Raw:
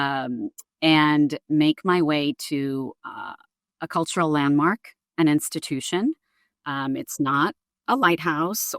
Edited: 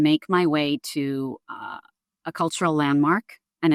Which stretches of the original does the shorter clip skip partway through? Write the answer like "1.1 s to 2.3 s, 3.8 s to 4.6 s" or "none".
none